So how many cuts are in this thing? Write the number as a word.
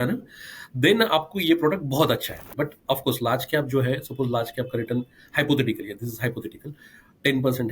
one